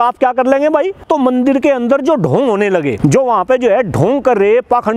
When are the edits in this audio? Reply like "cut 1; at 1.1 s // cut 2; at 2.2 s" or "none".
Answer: cut 1; at 1.0 s // cut 2; at 2.9 s